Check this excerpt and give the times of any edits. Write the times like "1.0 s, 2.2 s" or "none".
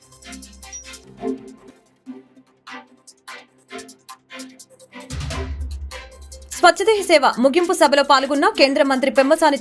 none